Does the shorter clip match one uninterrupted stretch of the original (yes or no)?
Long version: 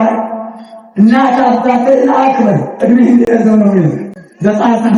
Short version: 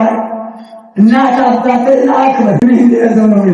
no